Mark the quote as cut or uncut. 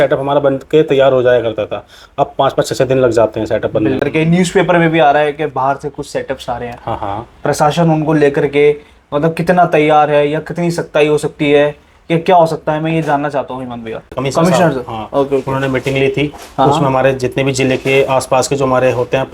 cut